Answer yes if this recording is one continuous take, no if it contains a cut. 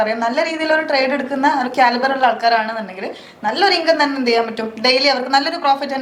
yes